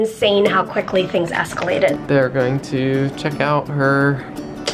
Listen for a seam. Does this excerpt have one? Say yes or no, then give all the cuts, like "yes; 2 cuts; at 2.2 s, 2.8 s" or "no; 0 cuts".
yes; 1 cut; at 2.0 s